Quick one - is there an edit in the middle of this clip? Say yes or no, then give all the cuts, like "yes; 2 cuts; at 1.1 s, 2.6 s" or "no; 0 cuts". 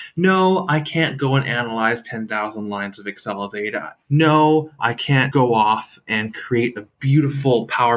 yes; 2 cuts; at 3.9 s, 5.3 s